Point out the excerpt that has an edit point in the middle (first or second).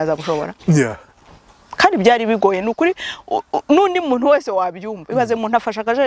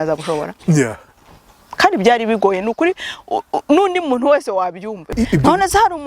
second